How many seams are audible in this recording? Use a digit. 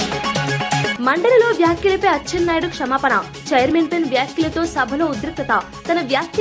0